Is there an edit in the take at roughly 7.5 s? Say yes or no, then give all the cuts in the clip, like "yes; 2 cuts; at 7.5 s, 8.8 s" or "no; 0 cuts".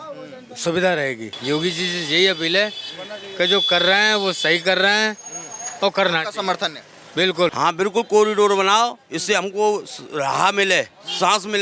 yes; 2 cuts; at 1.3 s, 7.5 s